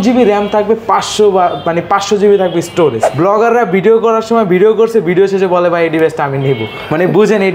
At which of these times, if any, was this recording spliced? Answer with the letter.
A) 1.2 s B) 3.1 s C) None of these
B